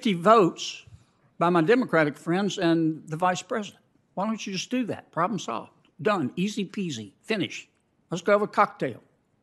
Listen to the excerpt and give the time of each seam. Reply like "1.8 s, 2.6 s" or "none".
none

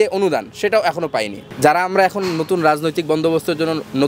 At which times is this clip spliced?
1.4 s

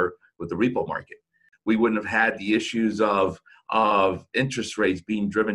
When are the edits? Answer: 1.5 s

